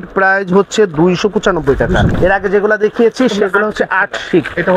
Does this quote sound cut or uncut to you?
cut